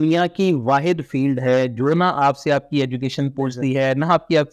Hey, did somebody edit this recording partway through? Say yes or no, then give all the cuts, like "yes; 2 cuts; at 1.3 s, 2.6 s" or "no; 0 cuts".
no; 0 cuts